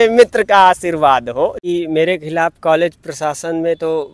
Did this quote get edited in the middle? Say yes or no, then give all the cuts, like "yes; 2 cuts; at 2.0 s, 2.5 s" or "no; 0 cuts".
yes; 1 cut; at 1.6 s